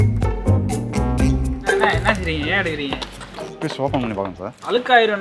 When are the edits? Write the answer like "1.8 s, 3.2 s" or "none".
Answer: 1.8 s